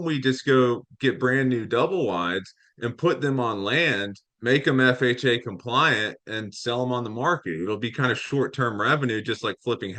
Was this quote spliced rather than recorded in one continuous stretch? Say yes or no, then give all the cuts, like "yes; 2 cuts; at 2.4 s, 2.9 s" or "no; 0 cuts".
no; 0 cuts